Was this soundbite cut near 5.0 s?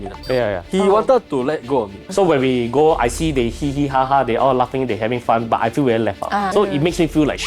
no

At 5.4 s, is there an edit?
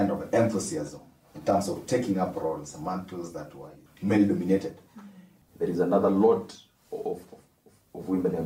yes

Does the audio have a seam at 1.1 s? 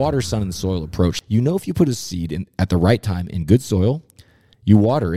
yes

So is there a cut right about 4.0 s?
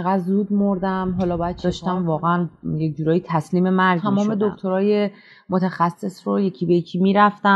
yes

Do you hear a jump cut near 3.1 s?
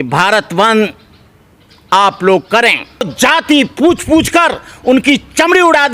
yes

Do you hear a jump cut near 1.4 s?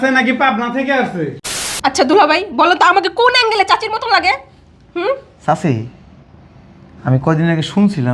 yes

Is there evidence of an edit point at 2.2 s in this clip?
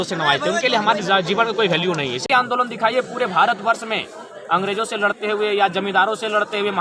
yes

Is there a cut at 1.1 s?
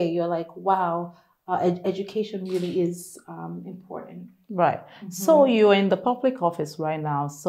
no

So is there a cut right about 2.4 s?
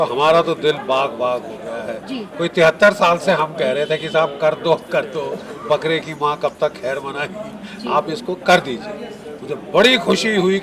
no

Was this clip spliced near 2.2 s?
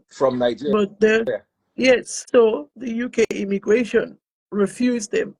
yes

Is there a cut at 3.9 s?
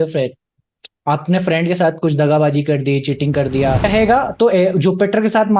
yes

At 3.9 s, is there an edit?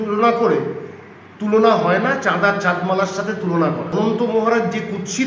yes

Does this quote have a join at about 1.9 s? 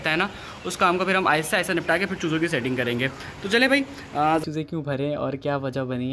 no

